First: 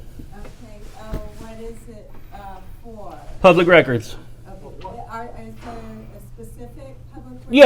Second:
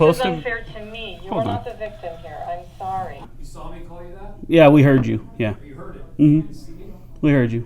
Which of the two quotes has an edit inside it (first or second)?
second